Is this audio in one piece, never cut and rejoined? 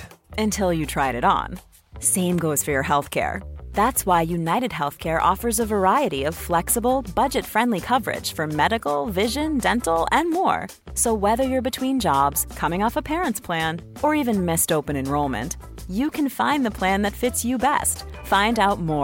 yes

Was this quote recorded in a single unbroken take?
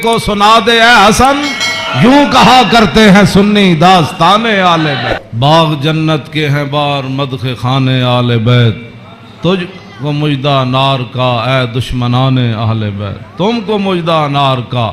no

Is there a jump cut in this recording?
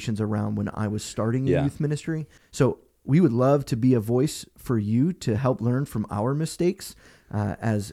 yes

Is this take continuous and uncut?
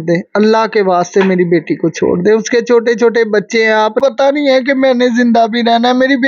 no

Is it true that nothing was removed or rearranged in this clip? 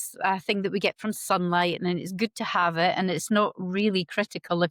yes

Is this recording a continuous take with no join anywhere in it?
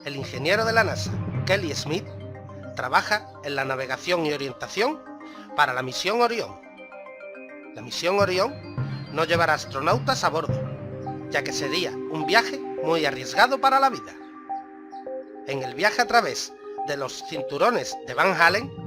no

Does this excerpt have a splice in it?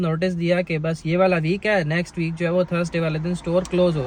no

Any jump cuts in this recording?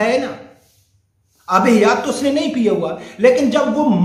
no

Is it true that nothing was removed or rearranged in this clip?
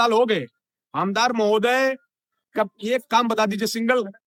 yes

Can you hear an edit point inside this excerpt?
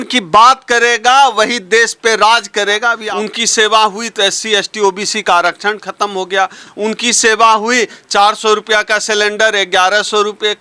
yes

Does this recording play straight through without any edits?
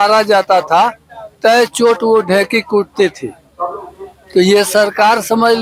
yes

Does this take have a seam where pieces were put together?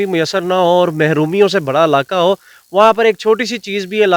no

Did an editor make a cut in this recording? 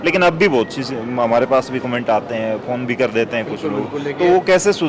no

